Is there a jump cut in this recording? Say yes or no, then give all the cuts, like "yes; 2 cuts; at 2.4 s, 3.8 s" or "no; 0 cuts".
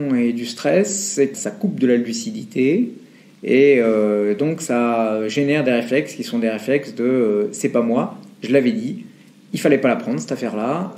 yes; 1 cut; at 1.3 s